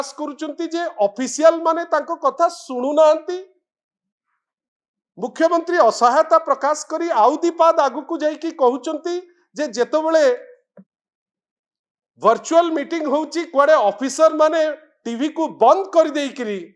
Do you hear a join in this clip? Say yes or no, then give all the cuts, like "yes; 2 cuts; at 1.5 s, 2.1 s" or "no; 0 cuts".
no; 0 cuts